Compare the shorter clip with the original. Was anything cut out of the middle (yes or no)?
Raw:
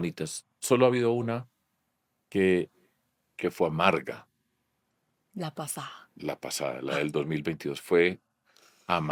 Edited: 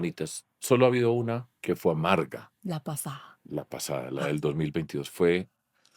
yes